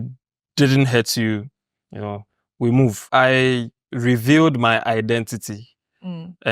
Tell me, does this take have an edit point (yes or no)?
yes